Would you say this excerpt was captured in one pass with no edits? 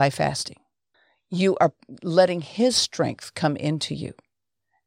yes; 0 cuts

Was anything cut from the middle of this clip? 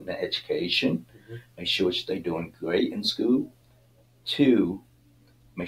no; 0 cuts

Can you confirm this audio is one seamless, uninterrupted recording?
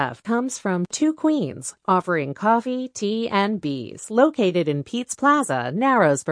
yes; 0 cuts

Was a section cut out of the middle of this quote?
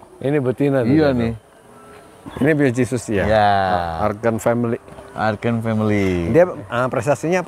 yes; 1 cut; at 2.3 s

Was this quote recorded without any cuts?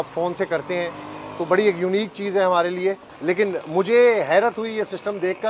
no; 1 cut; at 3.1 s

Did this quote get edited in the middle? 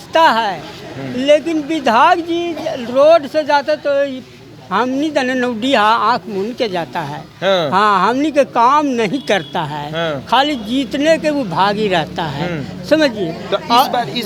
no; 0 cuts

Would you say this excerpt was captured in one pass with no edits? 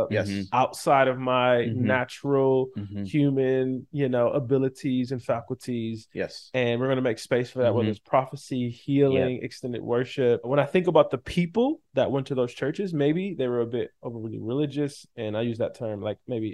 no; 1 cut; at 10.5 s

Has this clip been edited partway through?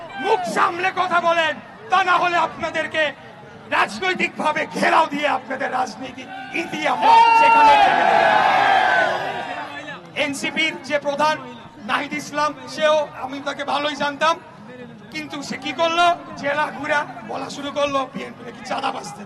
no; 0 cuts

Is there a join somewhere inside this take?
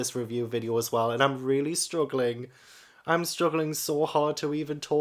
no; 0 cuts

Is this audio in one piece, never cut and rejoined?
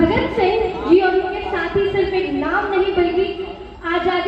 yes; 0 cuts

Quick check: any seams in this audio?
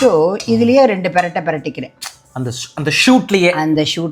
no; 0 cuts

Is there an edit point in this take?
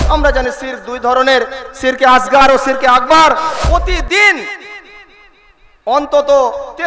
yes; 1 cut; at 3.6 s

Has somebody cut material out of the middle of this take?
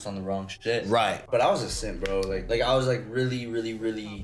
yes; 2 cuts; at 1.2 s, 2.4 s

